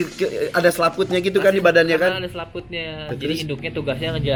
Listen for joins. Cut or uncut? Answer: uncut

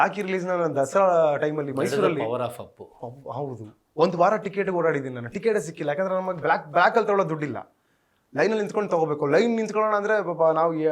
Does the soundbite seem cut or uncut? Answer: uncut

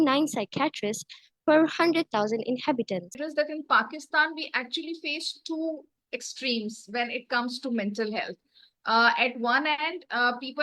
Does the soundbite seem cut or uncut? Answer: cut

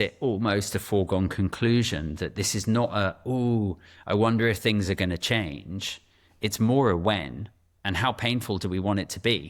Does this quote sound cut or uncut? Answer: uncut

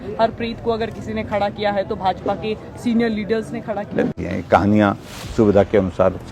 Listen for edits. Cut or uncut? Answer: cut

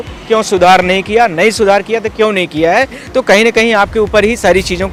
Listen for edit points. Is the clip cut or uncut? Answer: uncut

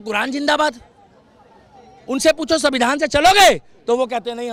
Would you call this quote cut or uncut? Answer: uncut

